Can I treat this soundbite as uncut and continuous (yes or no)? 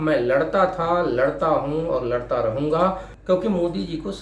no